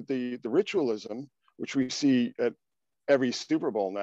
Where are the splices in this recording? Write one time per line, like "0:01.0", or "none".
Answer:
none